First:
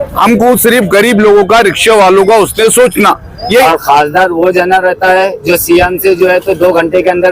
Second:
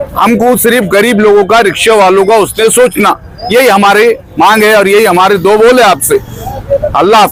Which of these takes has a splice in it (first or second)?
first